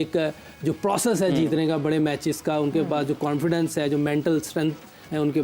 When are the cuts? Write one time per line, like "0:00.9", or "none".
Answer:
none